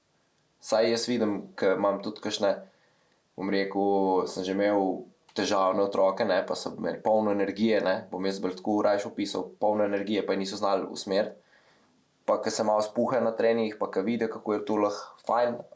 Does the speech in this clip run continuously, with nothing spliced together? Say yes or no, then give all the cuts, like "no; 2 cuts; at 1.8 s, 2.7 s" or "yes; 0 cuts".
yes; 0 cuts